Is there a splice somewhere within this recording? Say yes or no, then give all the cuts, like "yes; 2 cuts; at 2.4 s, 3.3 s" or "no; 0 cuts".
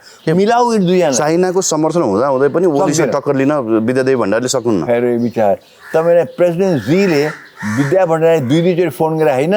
no; 0 cuts